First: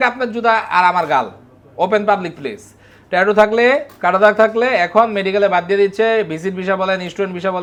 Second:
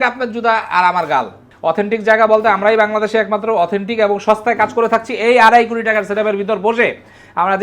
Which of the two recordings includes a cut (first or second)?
second